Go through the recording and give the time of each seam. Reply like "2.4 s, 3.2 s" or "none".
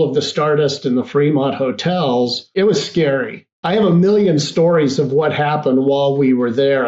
2.5 s, 3.5 s

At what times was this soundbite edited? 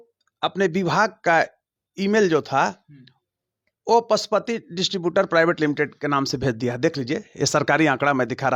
none

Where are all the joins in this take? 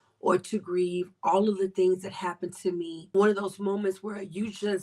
3.0 s

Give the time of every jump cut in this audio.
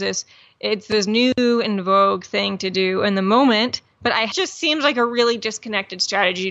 4.3 s

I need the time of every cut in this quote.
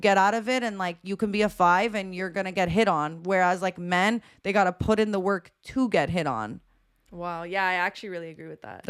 none

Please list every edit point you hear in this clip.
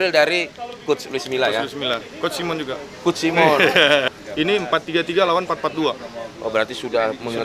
4.2 s

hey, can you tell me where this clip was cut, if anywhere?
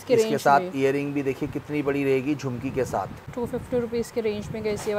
3.2 s

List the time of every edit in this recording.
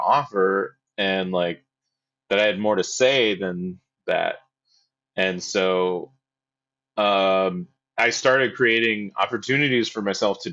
none

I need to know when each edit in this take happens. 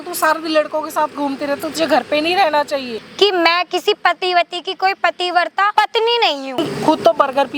3.0 s, 5.7 s, 6.5 s

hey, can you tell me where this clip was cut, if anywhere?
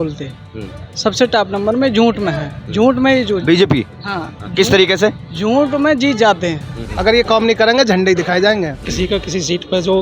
6.7 s, 8.8 s

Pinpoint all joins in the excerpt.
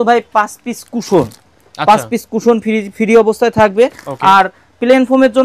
none

